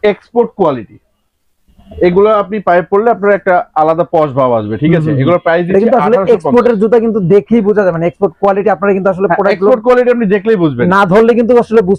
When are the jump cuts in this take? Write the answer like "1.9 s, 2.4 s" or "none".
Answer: none